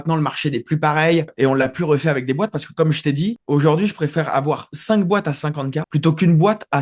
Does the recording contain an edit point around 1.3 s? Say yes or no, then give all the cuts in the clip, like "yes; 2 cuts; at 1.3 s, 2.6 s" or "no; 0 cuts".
yes; 1 cut; at 1.3 s